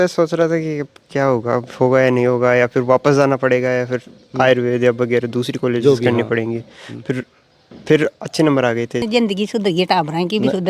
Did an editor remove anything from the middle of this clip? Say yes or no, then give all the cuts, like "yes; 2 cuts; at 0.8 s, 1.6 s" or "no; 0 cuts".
yes; 1 cut; at 9.1 s